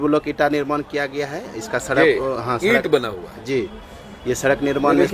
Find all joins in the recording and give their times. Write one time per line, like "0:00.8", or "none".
none